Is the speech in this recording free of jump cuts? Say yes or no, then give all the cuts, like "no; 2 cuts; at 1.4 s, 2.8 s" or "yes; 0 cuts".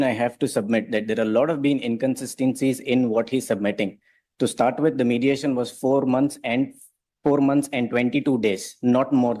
yes; 0 cuts